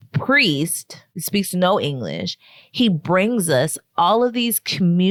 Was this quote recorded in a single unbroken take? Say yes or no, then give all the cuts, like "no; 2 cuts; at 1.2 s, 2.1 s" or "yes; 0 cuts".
yes; 0 cuts